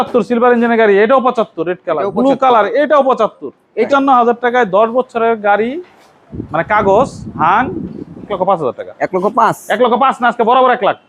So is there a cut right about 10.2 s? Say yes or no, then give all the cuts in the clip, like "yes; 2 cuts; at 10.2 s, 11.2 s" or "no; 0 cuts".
no; 2 cuts; at 3.9 s, 8.3 s